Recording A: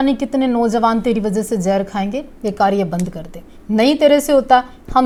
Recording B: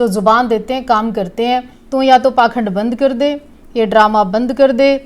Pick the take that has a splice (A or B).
B